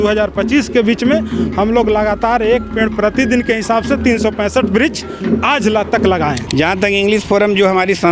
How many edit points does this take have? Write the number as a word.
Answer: one